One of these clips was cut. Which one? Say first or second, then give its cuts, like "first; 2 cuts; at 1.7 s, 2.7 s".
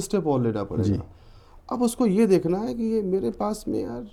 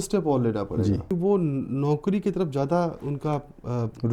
second; 1 cut; at 1.1 s